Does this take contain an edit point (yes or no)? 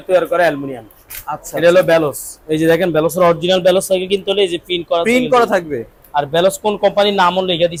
no